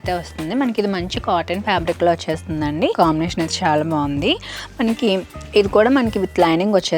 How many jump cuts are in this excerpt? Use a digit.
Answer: 1